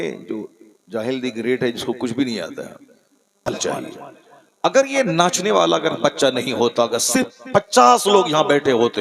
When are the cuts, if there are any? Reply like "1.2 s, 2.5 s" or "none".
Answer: 3.5 s